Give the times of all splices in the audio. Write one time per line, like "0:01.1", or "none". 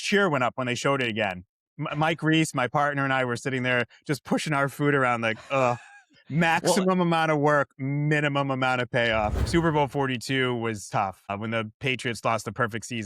0:01.6
0:09.4
0:11.3